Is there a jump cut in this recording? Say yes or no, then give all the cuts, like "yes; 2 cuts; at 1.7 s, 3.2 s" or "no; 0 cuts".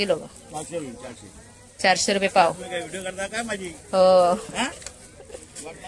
no; 0 cuts